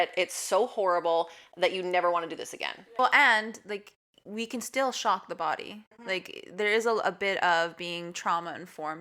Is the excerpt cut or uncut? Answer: uncut